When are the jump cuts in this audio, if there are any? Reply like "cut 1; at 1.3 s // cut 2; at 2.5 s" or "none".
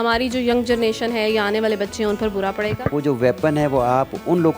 cut 1; at 2.9 s